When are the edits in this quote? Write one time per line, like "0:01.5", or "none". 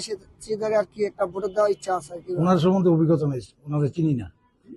0:02.3